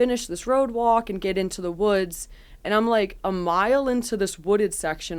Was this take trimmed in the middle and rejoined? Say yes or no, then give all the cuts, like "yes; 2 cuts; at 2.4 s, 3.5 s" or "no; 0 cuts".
no; 0 cuts